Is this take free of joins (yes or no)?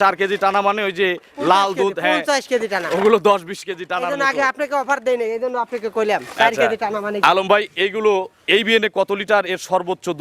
yes